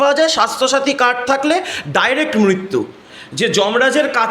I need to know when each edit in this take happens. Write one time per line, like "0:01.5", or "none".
0:03.0

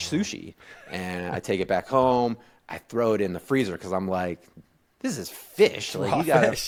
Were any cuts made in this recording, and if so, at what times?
none

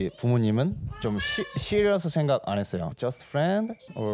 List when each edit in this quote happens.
0:02.9

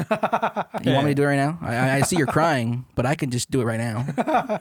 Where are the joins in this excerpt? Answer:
none

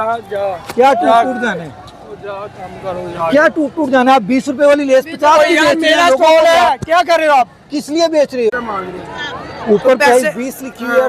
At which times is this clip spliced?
0:08.6

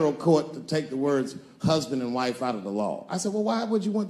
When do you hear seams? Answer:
none

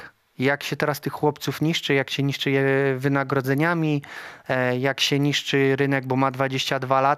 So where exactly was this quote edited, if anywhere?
none

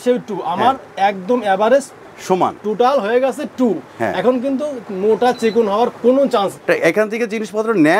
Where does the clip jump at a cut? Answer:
0:06.6

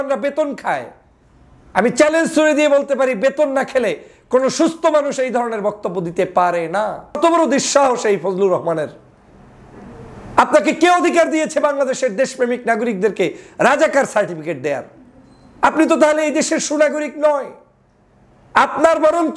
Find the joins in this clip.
0:07.2

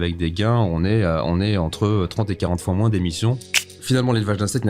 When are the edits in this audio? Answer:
0:03.6

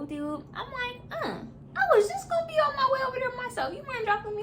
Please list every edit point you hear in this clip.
0:01.6

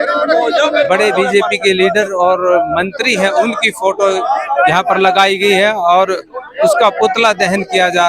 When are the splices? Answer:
none

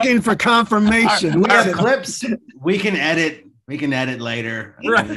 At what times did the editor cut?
0:02.1

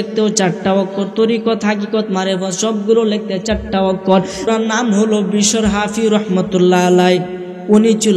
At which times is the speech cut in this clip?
0:04.5

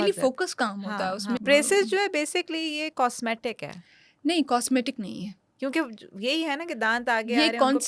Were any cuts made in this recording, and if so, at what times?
0:01.4

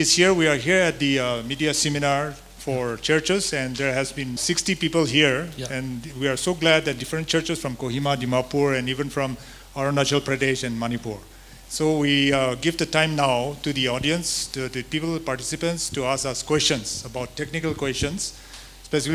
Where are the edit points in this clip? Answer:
none

